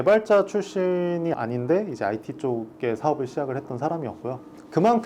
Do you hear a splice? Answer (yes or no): no